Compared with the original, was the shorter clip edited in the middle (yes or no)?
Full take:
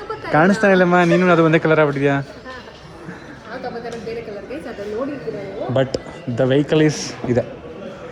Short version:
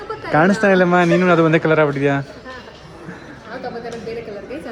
no